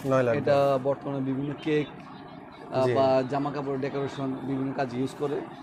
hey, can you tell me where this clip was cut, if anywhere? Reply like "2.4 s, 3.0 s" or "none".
none